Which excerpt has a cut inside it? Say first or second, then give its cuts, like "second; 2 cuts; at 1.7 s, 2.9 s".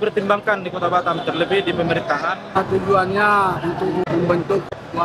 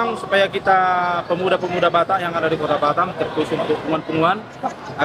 first; 1 cut; at 2.6 s